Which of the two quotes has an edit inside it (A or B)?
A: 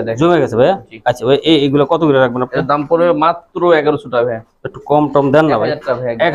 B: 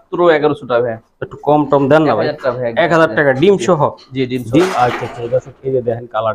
B